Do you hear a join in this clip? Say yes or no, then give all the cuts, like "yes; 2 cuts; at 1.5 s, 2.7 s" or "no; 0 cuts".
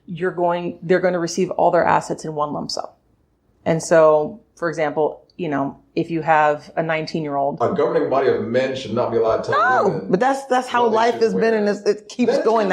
yes; 1 cut; at 7.6 s